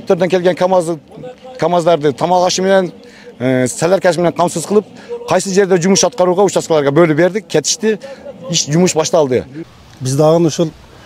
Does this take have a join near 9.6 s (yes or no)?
yes